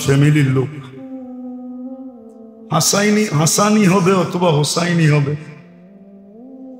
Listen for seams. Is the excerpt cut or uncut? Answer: cut